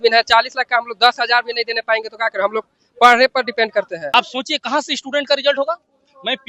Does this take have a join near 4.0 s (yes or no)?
yes